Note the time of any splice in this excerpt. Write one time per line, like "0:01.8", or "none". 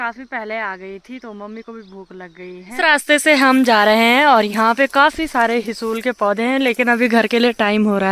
0:02.8